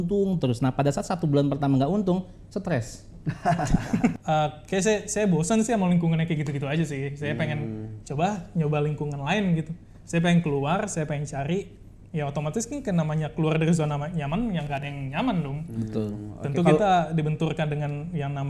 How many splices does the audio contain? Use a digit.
1